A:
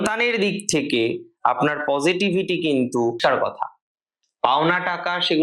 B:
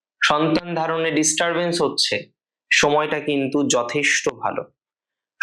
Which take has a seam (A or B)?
A